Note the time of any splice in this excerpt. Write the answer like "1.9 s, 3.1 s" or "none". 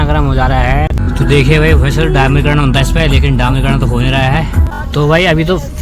1.0 s, 4.7 s